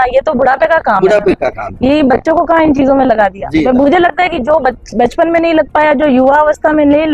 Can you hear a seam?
no; 0 cuts

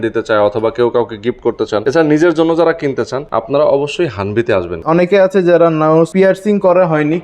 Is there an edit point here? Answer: yes; 4 cuts; at 1.8 s, 3.2 s, 4.8 s, 6.1 s

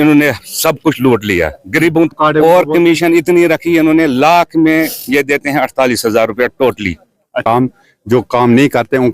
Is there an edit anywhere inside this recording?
yes; 2 cuts; at 2.1 s, 7.4 s

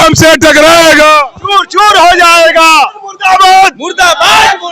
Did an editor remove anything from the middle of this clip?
yes; 1 cut; at 3.1 s

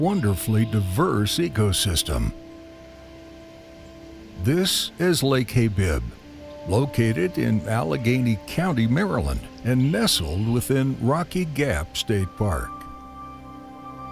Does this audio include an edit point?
yes; 1 cut; at 11.3 s

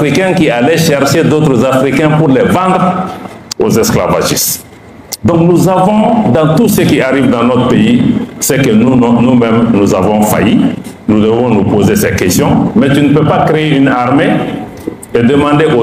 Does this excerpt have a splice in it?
yes; 1 cut; at 12.7 s

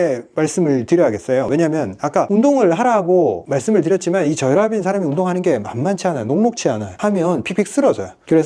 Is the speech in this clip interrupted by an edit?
no; 0 cuts

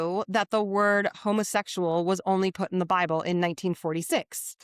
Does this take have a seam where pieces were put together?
no; 0 cuts

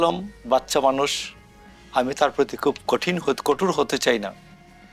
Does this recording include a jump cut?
no; 0 cuts

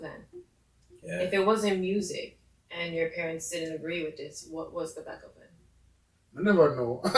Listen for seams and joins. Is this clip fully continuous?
yes; 0 cuts

